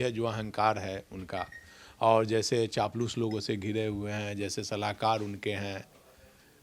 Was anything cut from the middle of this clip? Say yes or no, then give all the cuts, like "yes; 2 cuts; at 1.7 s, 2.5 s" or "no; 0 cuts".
no; 0 cuts